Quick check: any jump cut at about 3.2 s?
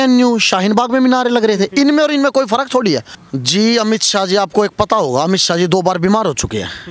yes; 1 cut; at 3.2 s

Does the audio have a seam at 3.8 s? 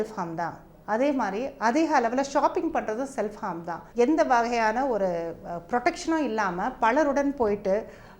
yes; 1 cut; at 3.8 s

